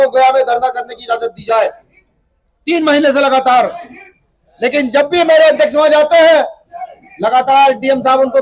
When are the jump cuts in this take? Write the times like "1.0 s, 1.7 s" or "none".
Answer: none